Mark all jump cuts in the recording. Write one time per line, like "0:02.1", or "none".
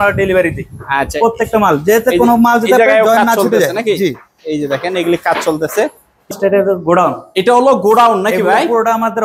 0:06.3